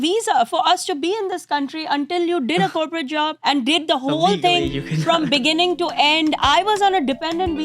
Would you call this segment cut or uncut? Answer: cut